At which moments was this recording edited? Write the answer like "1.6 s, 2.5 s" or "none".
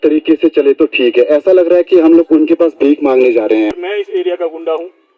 3.7 s